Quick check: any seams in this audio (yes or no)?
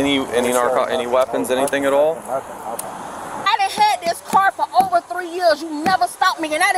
yes